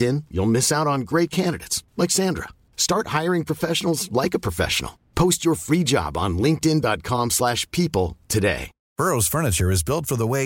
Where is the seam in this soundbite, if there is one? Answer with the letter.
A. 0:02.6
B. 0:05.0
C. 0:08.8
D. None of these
C